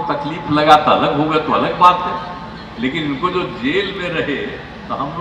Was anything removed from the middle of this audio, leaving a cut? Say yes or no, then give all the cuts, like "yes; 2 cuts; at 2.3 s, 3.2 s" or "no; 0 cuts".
no; 0 cuts